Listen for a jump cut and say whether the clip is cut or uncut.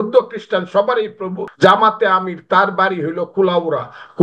cut